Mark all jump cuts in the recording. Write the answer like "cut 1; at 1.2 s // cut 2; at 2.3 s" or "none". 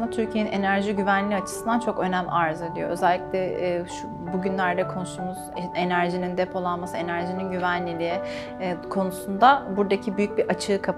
none